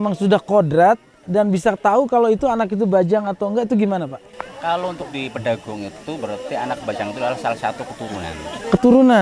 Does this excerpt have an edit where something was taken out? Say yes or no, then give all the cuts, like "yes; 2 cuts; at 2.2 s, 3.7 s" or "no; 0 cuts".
no; 0 cuts